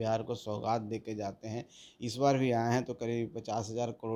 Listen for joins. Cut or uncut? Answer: uncut